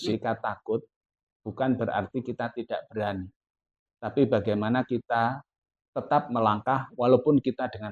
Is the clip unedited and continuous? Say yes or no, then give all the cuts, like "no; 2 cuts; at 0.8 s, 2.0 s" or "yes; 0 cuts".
yes; 0 cuts